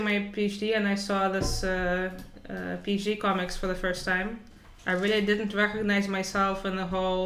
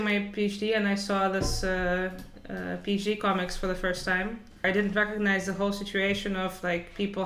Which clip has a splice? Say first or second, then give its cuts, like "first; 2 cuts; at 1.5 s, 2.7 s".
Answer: second; 1 cut; at 4.6 s